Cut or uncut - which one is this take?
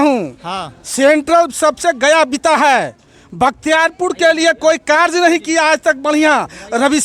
uncut